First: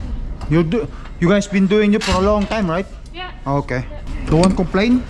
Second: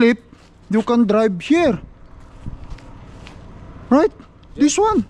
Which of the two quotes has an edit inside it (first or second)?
first